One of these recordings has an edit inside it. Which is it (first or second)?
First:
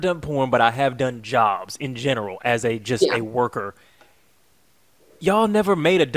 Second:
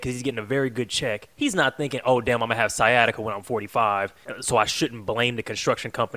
second